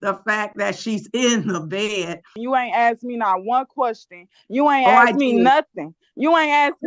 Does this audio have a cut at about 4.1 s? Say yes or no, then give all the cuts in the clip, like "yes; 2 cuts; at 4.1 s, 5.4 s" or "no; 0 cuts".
no; 1 cut; at 2.3 s